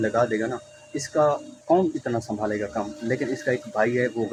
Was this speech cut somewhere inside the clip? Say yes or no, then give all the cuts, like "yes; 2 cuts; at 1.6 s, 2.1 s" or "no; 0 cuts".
no; 0 cuts